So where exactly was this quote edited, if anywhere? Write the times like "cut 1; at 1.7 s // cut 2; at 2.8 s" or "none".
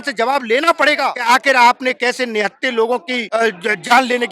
cut 1; at 1.3 s // cut 2; at 3.2 s

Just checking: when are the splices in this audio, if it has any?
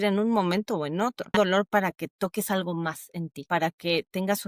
cut 1; at 1.3 s // cut 2; at 3.4 s

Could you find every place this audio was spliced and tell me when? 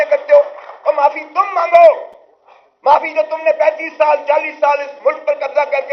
none

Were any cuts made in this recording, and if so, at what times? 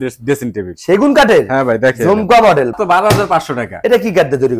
cut 1; at 2.8 s // cut 2; at 3.7 s

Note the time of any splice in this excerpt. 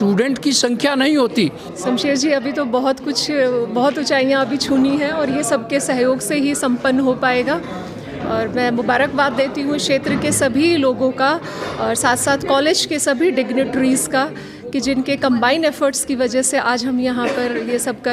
cut 1; at 1.7 s

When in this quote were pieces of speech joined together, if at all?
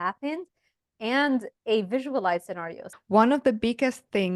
cut 1; at 2.8 s

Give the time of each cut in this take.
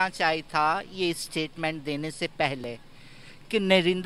none

